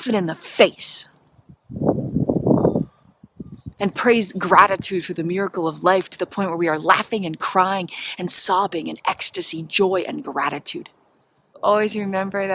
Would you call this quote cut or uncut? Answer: cut